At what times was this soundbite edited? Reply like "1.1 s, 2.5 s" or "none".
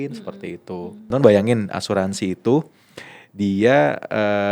1.1 s